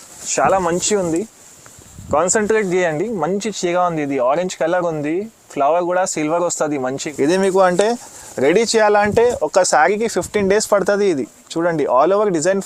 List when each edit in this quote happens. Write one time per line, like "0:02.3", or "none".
0:07.0